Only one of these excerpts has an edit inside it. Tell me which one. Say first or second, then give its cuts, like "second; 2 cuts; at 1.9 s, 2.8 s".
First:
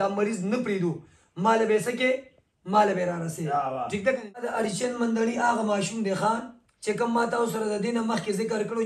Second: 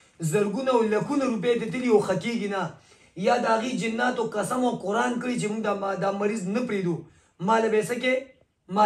first; 1 cut; at 4.4 s